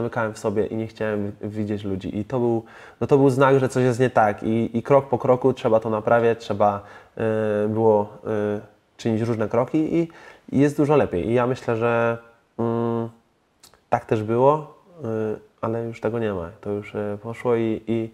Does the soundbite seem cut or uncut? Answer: uncut